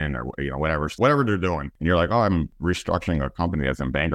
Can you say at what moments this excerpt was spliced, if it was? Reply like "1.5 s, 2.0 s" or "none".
1.0 s, 1.7 s, 2.5 s